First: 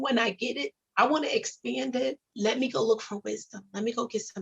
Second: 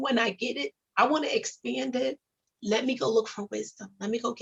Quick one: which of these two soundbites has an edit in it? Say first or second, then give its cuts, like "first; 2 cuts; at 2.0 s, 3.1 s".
first; 1 cut; at 2.3 s